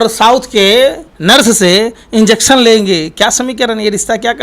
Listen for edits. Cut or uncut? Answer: cut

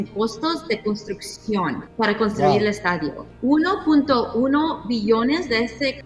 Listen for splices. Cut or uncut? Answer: uncut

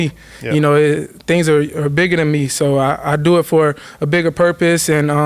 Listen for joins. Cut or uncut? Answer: uncut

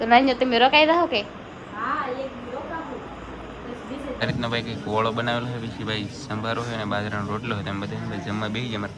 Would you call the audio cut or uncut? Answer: cut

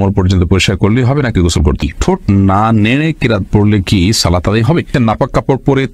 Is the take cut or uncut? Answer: cut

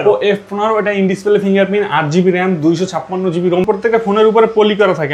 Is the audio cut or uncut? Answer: cut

